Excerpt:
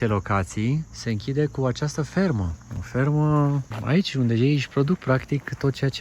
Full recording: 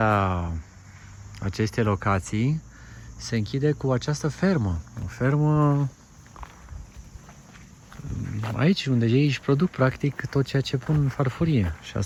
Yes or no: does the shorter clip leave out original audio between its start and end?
yes